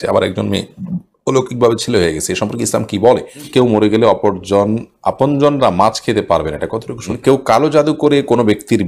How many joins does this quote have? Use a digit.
2